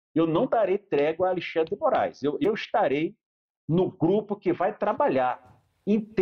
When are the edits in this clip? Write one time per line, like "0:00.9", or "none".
0:02.4